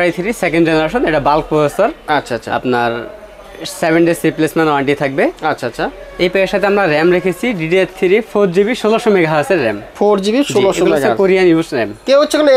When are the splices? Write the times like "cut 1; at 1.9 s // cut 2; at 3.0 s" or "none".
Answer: none